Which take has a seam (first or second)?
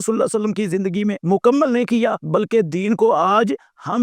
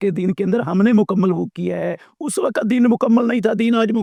first